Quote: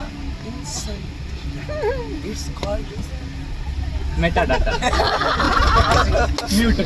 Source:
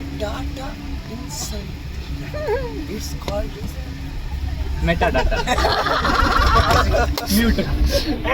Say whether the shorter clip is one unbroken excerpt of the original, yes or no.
no